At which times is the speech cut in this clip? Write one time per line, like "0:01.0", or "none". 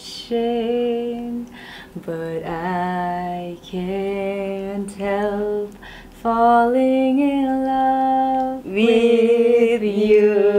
none